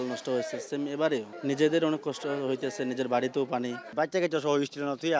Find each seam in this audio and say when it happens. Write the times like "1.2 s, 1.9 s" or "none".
1.3 s, 3.9 s